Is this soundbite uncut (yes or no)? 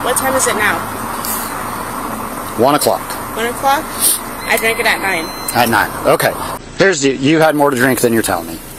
no